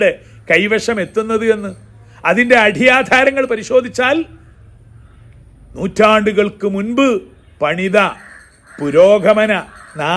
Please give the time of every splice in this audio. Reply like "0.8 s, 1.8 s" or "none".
none